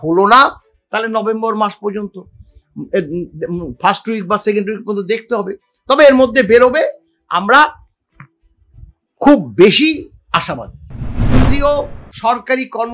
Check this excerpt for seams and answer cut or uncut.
cut